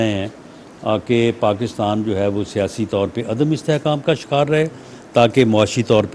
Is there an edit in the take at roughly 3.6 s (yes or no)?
yes